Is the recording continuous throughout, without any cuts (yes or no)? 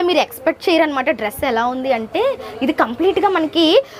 yes